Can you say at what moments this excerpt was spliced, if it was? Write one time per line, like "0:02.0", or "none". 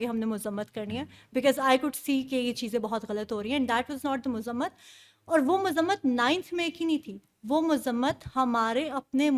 none